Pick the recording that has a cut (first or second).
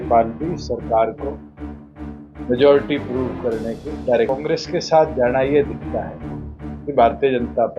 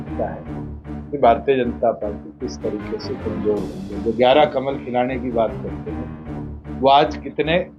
first